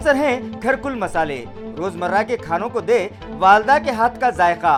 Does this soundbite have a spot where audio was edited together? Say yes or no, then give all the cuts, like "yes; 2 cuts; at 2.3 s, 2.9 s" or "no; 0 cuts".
no; 0 cuts